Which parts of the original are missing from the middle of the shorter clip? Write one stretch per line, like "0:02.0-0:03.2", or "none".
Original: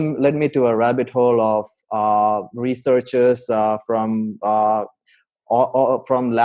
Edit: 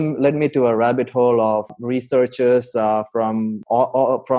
0:01.8-0:02.5
0:04.3-0:05.4